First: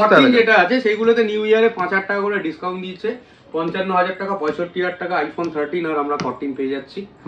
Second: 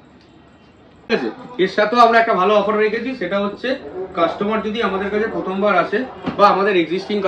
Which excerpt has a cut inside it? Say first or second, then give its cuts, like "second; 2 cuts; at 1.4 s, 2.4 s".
second; 1 cut; at 1.1 s